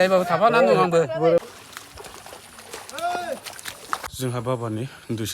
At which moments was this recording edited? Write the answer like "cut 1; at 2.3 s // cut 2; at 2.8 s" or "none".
cut 1; at 1.4 s // cut 2; at 4.1 s